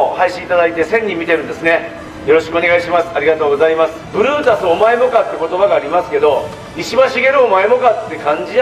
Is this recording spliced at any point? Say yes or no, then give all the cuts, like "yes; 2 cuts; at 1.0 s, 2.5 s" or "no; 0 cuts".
yes; 1 cut; at 4.0 s